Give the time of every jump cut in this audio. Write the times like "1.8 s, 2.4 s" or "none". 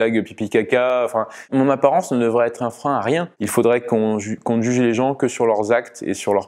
0.9 s, 3.3 s